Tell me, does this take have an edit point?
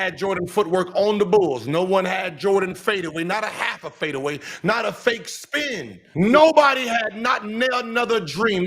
yes; 1 cut; at 6.0 s

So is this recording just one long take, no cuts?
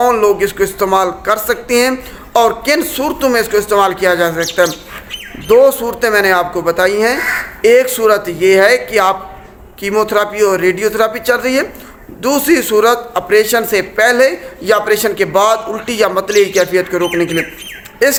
yes; 0 cuts

